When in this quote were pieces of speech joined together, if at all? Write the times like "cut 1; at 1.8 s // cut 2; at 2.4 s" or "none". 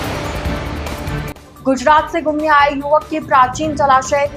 cut 1; at 1.2 s